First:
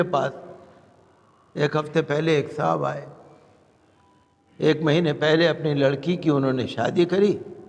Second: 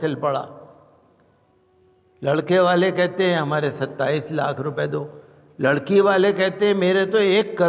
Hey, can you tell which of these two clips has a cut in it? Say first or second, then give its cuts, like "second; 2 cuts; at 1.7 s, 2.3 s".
first; 1 cut; at 4.3 s